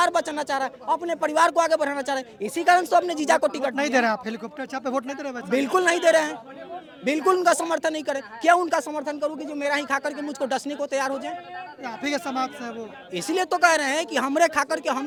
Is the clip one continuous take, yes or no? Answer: yes